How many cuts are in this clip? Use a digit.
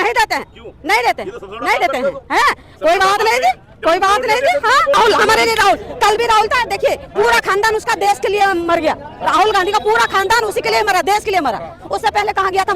1